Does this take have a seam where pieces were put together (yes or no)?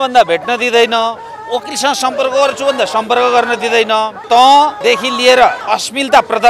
yes